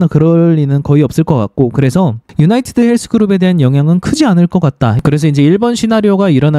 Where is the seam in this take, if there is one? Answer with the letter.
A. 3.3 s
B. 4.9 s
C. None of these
B